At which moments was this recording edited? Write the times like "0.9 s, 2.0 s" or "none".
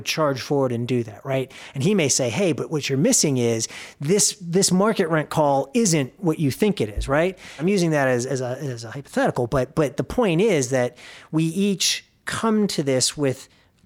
7.5 s